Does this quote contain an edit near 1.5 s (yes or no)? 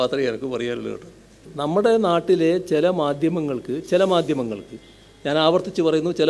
yes